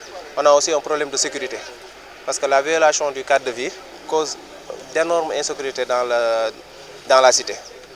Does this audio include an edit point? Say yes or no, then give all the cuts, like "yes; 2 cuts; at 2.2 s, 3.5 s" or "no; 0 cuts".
yes; 1 cut; at 3.9 s